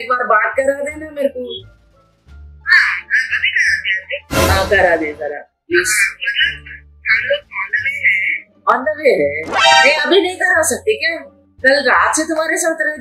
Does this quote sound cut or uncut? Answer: cut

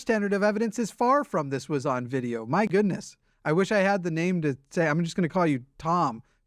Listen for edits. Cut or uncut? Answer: uncut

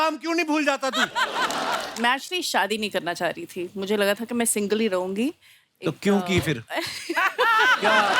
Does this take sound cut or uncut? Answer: cut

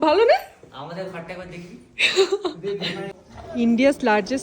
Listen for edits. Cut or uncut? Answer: cut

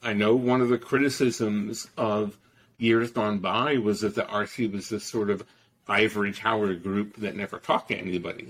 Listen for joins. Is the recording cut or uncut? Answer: uncut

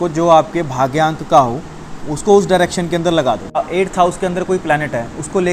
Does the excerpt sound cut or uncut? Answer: cut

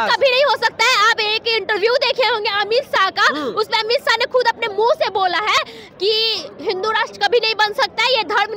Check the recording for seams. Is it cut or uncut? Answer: uncut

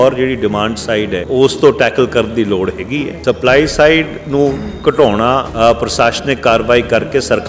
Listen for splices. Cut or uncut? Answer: cut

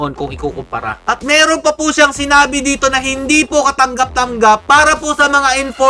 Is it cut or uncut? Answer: cut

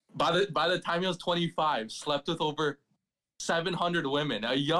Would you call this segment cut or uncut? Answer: uncut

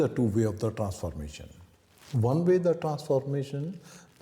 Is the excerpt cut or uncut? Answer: uncut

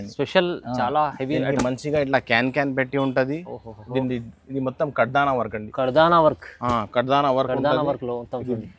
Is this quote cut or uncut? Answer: uncut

